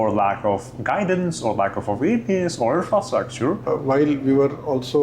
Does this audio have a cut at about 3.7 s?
yes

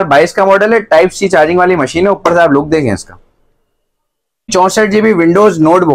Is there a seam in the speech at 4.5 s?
yes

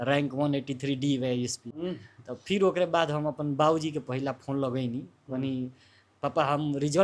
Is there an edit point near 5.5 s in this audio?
no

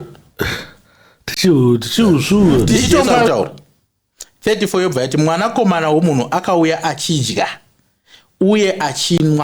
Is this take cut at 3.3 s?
yes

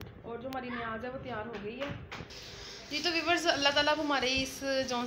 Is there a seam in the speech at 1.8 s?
no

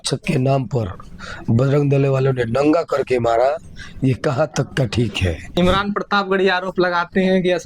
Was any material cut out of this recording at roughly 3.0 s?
no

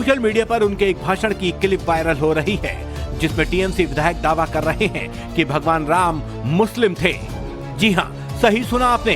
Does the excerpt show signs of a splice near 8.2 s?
yes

